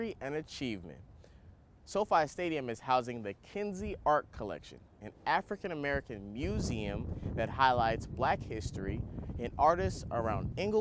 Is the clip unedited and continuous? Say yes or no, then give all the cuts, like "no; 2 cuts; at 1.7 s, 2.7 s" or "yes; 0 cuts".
yes; 0 cuts